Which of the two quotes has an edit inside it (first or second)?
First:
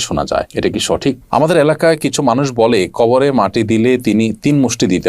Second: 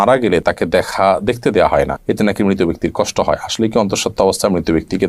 first